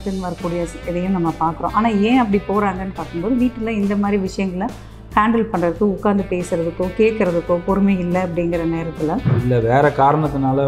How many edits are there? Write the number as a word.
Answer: one